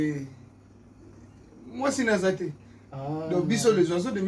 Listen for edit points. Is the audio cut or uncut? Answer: uncut